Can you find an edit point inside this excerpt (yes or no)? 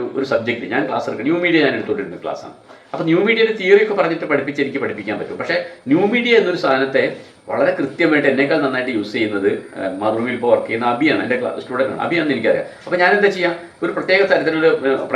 no